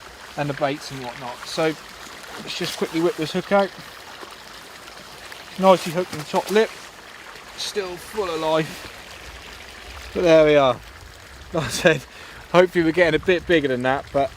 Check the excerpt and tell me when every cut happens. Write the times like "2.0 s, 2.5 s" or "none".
6.0 s